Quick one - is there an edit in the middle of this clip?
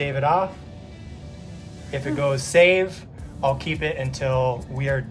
no; 0 cuts

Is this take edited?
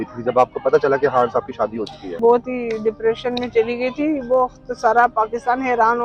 yes; 1 cut; at 2.1 s

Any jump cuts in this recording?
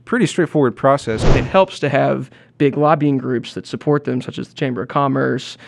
yes; 1 cut; at 1.3 s

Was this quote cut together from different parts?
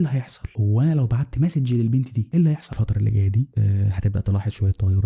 yes; 1 cut; at 2.7 s

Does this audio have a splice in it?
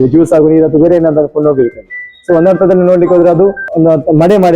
yes; 1 cut; at 3.6 s

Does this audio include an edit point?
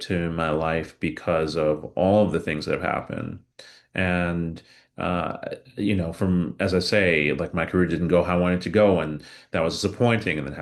no; 0 cuts

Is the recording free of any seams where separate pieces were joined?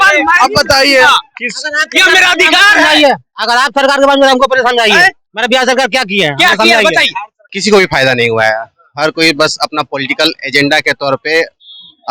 no; 1 cut; at 7.5 s

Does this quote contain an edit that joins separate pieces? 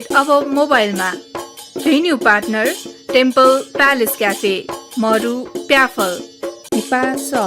yes; 2 cuts; at 2.9 s, 6.5 s

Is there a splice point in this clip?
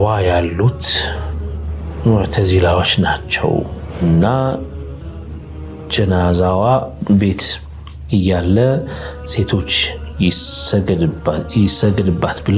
no; 0 cuts

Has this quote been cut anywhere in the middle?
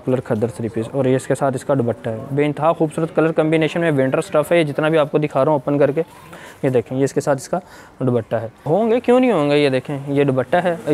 yes; 1 cut; at 8.5 s

